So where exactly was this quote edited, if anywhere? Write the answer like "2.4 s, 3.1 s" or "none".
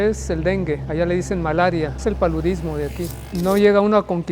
0.8 s, 1.9 s, 3.2 s